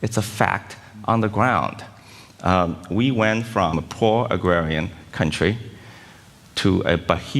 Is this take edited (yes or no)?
yes